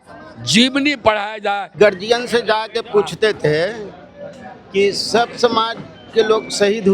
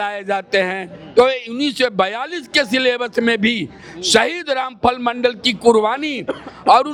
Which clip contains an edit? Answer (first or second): first